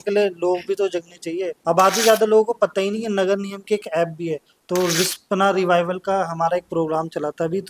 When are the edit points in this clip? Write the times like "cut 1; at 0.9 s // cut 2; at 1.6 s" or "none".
cut 1; at 1.5 s // cut 2; at 4.5 s